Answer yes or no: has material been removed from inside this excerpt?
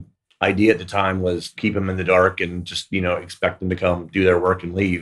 yes